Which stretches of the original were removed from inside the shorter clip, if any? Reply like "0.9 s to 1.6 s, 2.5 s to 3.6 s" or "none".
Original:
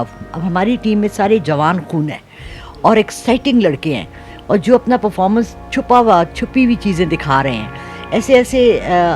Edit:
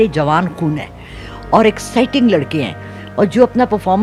none